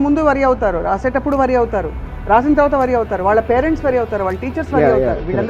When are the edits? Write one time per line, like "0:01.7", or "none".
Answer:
none